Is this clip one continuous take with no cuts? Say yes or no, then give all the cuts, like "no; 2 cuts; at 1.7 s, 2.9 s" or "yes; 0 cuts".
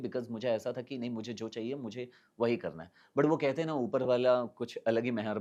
yes; 0 cuts